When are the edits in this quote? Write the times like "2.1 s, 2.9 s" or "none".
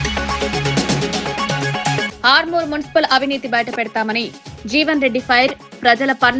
2.0 s